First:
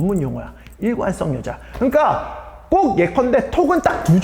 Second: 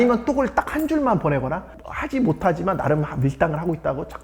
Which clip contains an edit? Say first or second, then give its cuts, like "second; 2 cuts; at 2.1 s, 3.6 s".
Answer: second; 1 cut; at 1.7 s